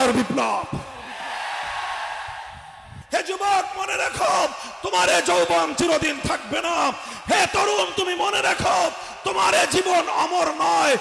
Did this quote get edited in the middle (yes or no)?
yes